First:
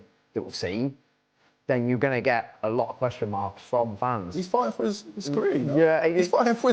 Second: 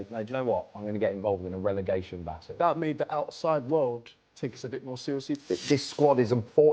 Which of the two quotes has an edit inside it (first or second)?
second